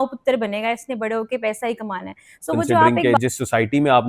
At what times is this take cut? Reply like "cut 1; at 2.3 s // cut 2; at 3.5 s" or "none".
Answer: cut 1; at 2.9 s